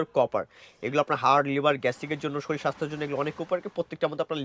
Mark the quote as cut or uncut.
uncut